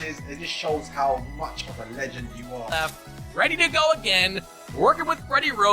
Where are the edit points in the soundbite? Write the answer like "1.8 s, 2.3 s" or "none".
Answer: 3.0 s